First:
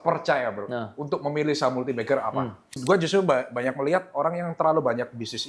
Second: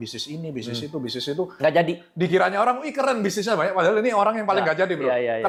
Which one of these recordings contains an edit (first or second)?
first